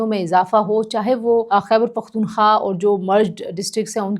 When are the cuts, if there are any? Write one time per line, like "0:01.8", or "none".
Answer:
0:01.5